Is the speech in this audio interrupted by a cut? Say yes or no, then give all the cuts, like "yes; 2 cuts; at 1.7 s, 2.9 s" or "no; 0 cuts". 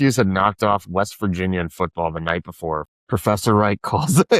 yes; 1 cut; at 2.9 s